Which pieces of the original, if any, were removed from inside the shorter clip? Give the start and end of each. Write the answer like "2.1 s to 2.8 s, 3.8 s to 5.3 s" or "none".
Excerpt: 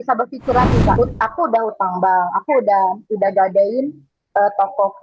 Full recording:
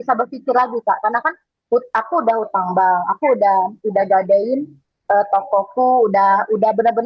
1.0 s to 1.7 s